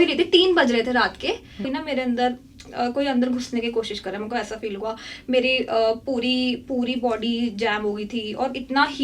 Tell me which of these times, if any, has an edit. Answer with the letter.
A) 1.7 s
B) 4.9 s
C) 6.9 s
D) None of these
A